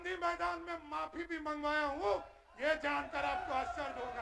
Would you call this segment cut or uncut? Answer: uncut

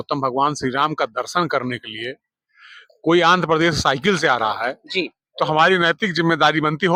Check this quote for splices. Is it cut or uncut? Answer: uncut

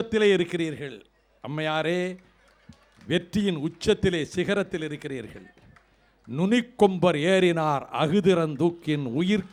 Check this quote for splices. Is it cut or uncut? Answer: uncut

